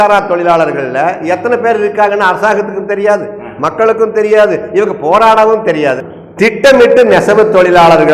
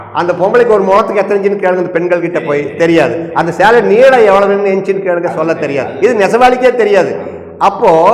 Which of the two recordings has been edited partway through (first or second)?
first